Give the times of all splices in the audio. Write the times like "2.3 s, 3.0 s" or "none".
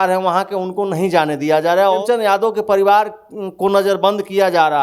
2.0 s